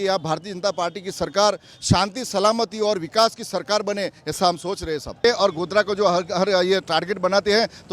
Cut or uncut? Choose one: cut